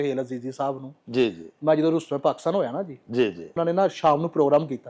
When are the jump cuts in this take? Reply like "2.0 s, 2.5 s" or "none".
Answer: none